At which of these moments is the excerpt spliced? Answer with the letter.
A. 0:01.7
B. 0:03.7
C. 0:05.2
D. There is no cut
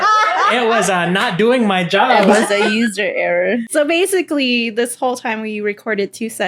B